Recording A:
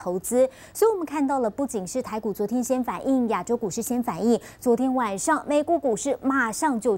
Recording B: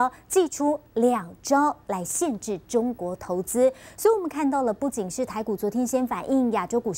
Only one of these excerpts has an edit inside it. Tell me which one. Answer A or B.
B